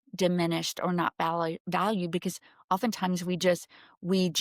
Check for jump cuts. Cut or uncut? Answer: uncut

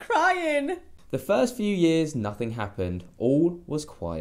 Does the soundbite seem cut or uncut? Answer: cut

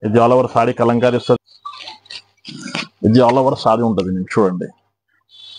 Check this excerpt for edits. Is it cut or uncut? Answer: cut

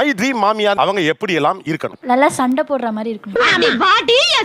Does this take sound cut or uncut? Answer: uncut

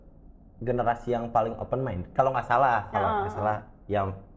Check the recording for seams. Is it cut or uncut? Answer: uncut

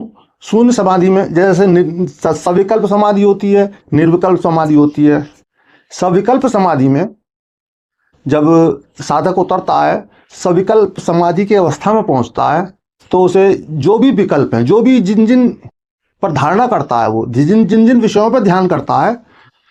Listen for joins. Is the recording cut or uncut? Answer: uncut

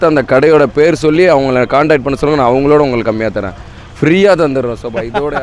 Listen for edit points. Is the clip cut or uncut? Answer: uncut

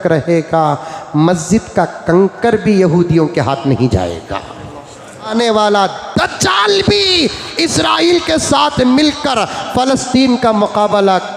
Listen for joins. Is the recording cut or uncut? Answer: cut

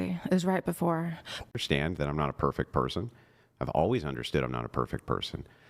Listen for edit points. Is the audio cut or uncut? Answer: cut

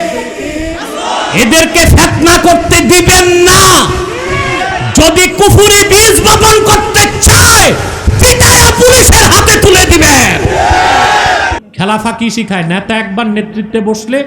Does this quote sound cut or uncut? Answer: cut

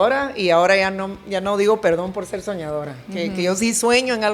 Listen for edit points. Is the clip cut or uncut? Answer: uncut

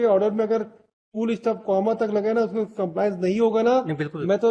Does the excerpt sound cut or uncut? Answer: uncut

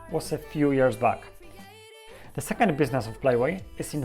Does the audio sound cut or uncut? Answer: cut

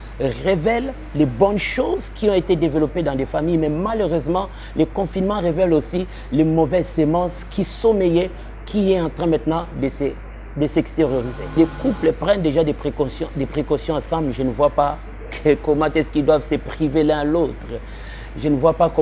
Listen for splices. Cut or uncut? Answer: cut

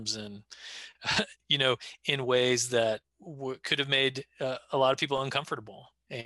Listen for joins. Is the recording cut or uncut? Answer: cut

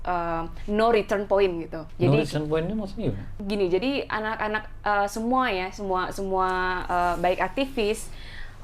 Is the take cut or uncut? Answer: cut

